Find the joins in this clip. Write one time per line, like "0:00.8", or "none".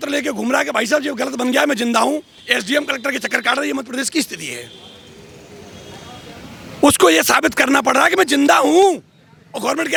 none

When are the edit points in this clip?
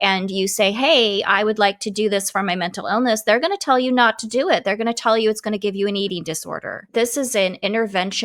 0:06.8

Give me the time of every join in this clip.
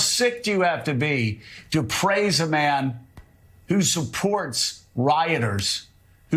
none

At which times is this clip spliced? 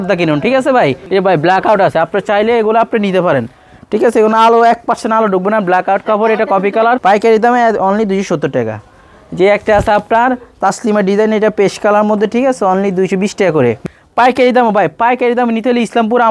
0:01.0
0:07.0
0:13.8

